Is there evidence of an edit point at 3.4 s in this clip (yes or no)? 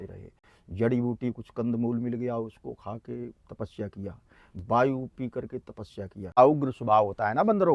no